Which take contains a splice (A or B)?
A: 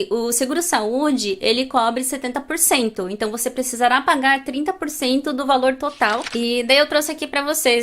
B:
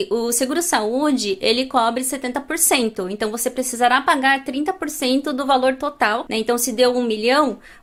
A